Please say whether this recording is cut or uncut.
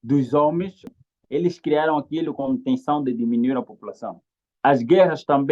cut